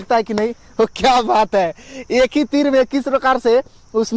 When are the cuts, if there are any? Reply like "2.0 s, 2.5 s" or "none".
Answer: none

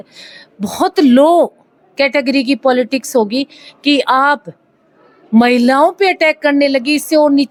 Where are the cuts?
none

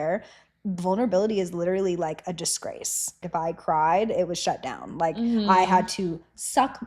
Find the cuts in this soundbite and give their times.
3.2 s

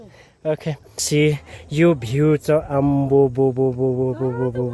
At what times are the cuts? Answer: 1.0 s

